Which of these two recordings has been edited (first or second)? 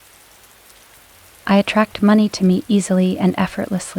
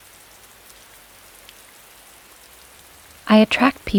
first